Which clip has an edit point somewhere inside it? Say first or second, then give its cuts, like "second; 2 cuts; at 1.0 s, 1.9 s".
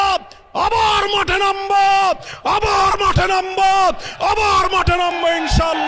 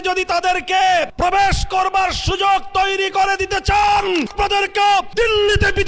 second; 2 cuts; at 1.1 s, 4.7 s